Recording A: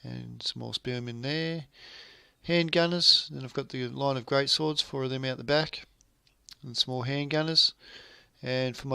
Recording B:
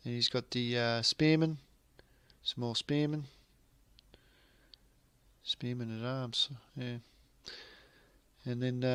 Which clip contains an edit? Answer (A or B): A